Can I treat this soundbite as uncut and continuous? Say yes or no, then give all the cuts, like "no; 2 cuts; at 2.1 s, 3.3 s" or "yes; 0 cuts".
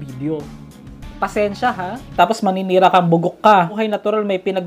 no; 2 cuts; at 2.1 s, 3.8 s